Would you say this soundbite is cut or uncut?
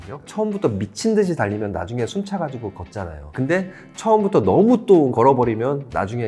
uncut